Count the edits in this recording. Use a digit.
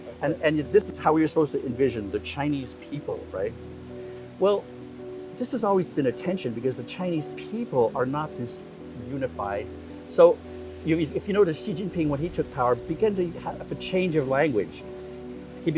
1